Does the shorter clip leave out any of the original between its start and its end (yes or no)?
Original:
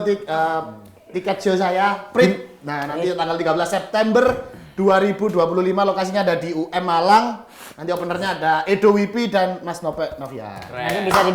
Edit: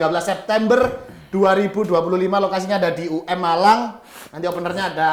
no